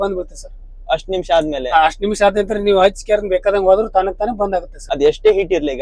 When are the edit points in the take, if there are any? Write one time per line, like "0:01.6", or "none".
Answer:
0:04.8